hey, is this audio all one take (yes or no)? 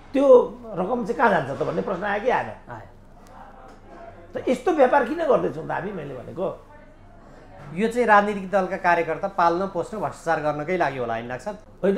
yes